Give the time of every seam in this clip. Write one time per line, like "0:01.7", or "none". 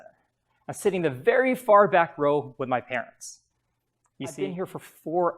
0:04.4